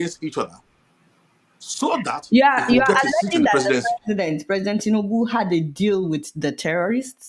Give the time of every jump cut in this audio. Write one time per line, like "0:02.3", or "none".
none

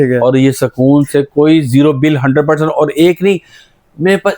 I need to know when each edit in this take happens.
none

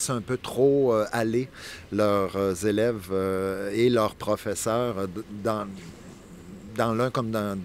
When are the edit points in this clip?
none

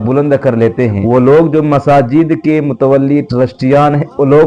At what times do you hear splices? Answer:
0:01.0

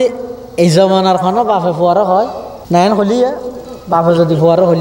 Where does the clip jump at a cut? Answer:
0:02.5

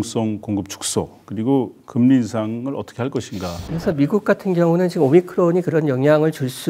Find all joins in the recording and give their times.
0:03.7

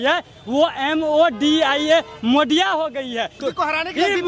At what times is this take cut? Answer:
0:03.4

